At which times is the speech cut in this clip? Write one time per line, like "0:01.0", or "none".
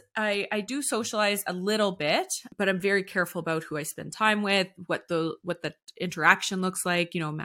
0:02.4